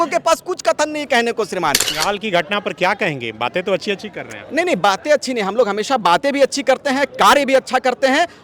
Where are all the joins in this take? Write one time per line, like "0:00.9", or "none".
0:01.9